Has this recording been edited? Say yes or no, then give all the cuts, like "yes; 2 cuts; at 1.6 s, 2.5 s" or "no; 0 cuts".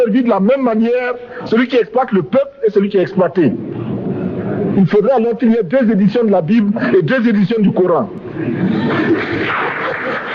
no; 0 cuts